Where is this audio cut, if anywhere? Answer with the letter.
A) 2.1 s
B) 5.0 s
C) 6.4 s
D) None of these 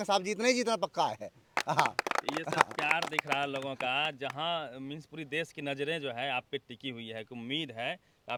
D